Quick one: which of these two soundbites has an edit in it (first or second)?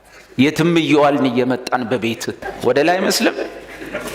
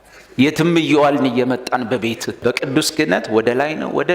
second